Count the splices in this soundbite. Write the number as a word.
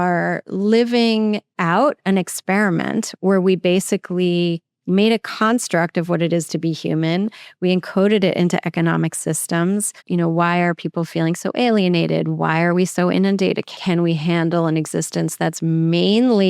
two